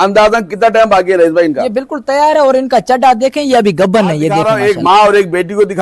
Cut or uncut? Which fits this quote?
cut